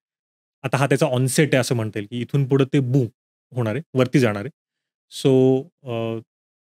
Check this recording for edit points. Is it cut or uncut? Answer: uncut